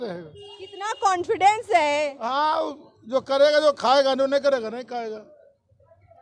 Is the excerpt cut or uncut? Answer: uncut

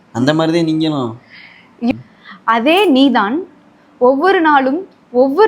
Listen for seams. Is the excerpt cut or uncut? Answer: cut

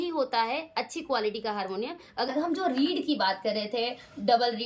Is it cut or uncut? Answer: cut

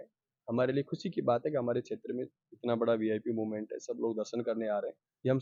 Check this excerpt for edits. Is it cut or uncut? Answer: uncut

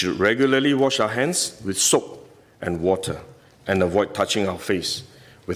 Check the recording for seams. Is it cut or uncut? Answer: uncut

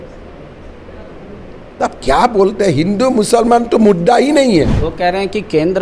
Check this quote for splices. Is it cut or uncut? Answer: cut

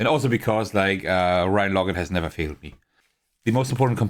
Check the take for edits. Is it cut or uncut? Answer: cut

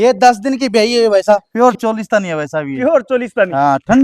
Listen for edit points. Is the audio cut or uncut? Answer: cut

